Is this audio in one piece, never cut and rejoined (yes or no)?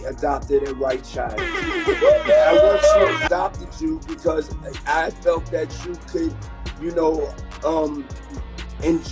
no